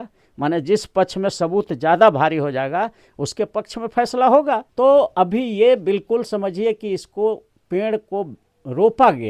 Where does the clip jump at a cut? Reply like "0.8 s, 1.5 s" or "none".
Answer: 4.7 s